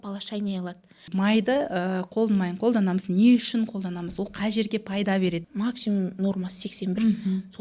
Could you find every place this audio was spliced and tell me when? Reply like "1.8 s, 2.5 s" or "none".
1.0 s, 5.5 s